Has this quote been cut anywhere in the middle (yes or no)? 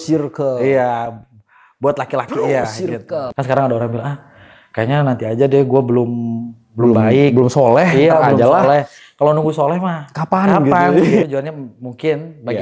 yes